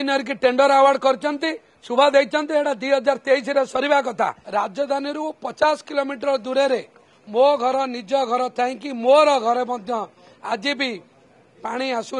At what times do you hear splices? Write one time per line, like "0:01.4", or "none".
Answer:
0:04.4